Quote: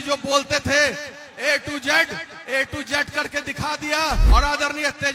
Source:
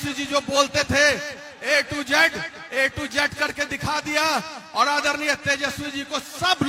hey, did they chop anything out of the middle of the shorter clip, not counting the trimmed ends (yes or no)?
yes